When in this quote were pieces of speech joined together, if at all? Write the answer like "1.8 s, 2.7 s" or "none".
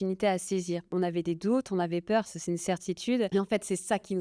0.9 s, 3.3 s